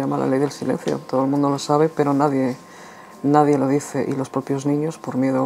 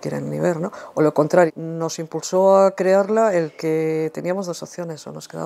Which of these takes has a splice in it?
second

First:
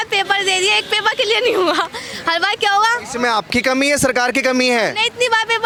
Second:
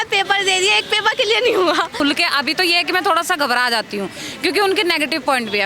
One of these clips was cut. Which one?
second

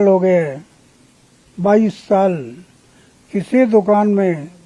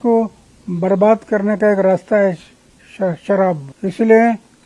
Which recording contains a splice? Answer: second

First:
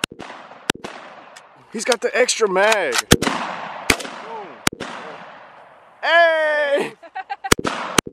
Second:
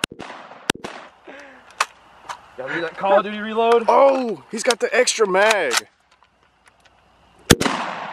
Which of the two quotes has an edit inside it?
first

